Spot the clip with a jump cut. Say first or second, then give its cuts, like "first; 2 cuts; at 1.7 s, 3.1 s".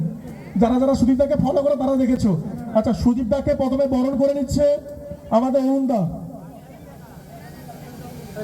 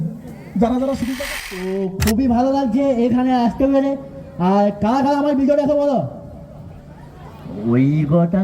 second; 1 cut; at 1.1 s